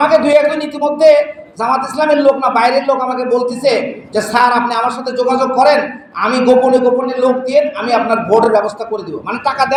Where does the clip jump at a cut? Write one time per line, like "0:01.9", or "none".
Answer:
none